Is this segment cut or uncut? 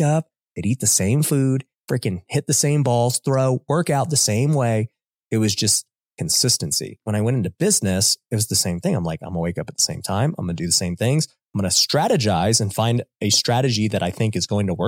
cut